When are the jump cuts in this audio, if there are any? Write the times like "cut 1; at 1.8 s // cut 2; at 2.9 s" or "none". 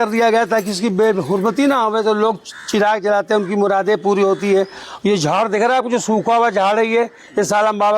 none